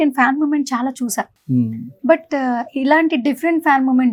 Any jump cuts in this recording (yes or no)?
no